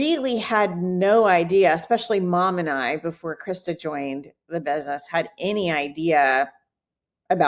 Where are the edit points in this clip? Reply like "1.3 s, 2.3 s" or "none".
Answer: none